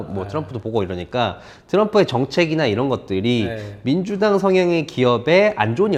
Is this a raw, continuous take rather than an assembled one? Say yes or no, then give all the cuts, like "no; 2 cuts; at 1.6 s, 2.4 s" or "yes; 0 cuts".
yes; 0 cuts